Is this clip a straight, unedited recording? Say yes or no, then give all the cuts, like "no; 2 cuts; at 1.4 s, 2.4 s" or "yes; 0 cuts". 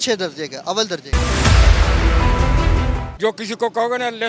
no; 2 cuts; at 1.1 s, 3.1 s